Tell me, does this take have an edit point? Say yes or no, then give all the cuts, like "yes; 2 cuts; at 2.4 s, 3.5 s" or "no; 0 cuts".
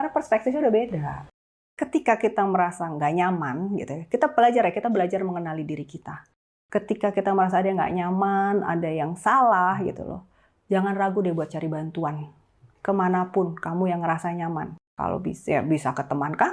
yes; 1 cut; at 1.2 s